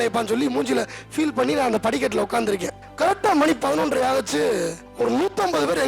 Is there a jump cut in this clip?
yes; 2 cuts; at 2.8 s, 4.8 s

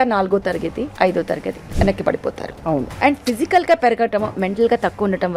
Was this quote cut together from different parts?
yes; 3 cuts; at 0.9 s, 1.6 s, 2.9 s

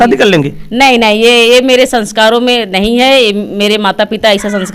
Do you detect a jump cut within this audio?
no; 0 cuts

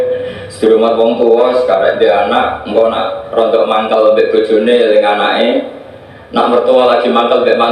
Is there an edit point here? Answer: yes; 1 cut; at 2.0 s

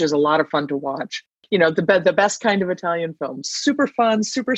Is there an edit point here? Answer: yes; 1 cut; at 1.3 s

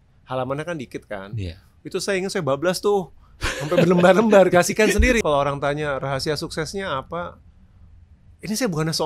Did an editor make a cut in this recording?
yes; 1 cut; at 5.2 s

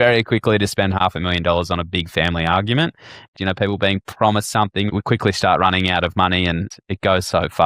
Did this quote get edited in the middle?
yes; 4 cuts; at 1.0 s, 3.3 s, 4.9 s, 6.7 s

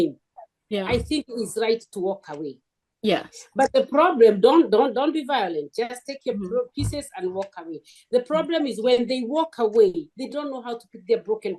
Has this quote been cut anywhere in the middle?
no; 0 cuts

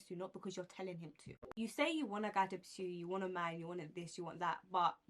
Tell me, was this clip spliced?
yes; 1 cut; at 1.5 s

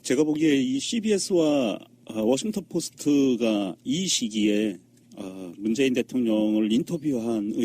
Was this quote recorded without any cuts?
yes; 0 cuts

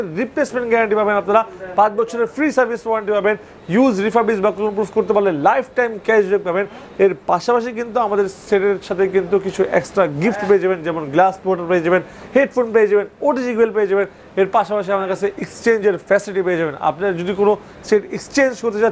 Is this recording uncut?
yes; 0 cuts

